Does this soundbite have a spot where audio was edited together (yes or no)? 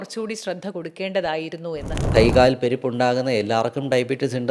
yes